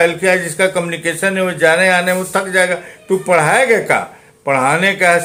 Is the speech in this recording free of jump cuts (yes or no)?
yes